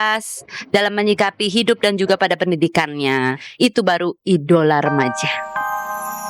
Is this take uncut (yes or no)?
no